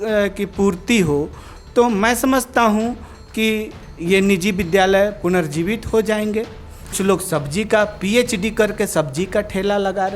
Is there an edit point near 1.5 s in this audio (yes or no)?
no